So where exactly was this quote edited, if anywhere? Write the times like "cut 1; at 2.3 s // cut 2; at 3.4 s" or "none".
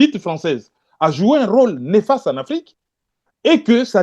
none